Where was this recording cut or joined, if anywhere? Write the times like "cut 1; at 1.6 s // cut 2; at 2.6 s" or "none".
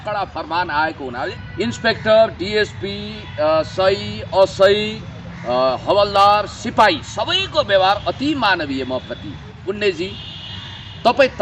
cut 1; at 1.3 s // cut 2; at 9.5 s